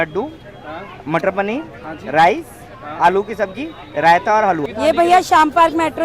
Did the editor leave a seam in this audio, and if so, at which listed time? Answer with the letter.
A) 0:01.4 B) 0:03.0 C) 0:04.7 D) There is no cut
C